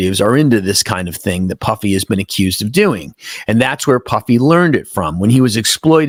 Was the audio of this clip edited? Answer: no; 0 cuts

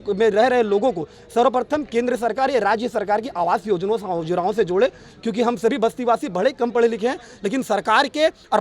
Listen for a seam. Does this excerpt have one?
no; 0 cuts

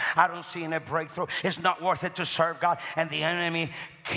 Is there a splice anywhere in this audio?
no; 0 cuts

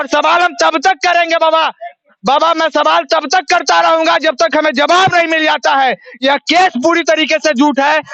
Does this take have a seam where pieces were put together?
no; 0 cuts

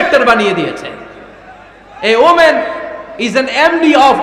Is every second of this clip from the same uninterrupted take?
yes; 0 cuts

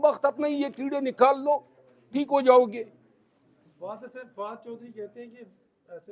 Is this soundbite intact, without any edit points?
yes; 0 cuts

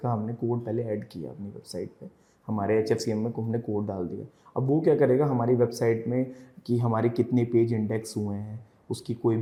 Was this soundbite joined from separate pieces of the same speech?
no; 0 cuts

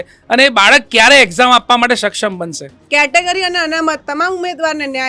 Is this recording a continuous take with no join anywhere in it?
no; 1 cut; at 2.8 s

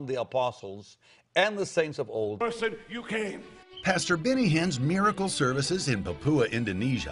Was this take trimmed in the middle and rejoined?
no; 0 cuts

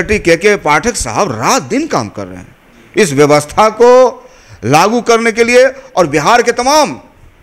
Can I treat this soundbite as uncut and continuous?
yes; 0 cuts

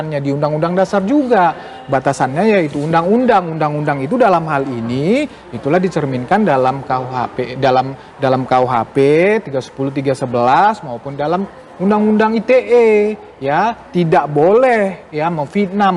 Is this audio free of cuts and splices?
yes; 0 cuts

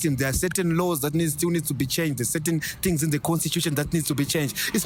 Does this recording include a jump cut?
no; 0 cuts

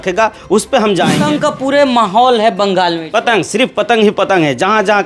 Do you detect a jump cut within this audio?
yes; 1 cut; at 1.2 s

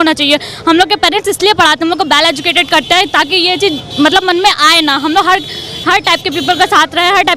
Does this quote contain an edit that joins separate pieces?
no; 0 cuts

